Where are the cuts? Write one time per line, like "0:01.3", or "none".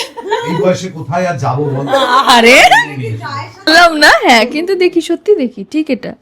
0:03.7